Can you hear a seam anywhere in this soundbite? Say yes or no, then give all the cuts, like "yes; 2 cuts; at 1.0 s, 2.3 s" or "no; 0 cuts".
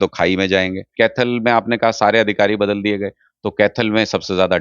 yes; 1 cut; at 0.9 s